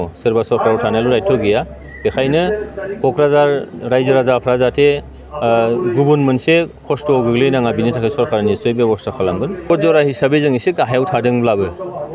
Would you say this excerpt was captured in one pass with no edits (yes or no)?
no